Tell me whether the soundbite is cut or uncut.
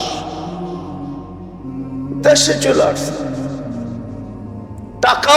cut